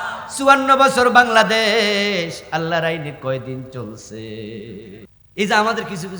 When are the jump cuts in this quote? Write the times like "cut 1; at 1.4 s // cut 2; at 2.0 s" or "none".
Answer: cut 1; at 5.1 s